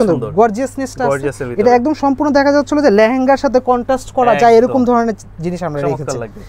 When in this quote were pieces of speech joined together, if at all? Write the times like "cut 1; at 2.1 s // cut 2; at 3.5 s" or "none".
none